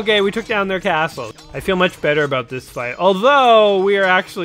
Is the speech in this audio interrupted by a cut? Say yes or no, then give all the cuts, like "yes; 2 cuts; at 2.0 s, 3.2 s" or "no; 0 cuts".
yes; 1 cut; at 1.3 s